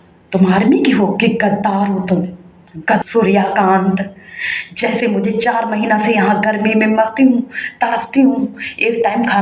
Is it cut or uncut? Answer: cut